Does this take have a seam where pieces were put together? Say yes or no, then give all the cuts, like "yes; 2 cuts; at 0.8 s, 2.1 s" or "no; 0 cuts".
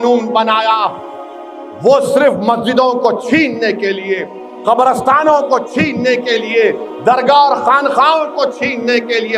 no; 0 cuts